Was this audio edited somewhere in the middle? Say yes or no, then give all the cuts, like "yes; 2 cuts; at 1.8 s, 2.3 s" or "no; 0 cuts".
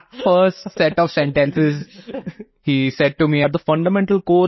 yes; 1 cut; at 3.4 s